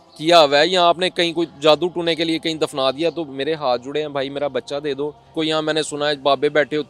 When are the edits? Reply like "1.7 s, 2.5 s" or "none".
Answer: 5.3 s